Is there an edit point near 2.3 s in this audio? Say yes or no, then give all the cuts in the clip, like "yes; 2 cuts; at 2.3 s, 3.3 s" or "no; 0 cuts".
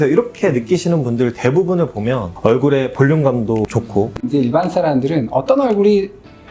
yes; 2 cuts; at 2.3 s, 4.2 s